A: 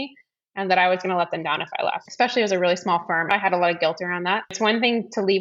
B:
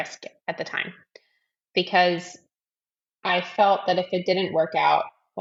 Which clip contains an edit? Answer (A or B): A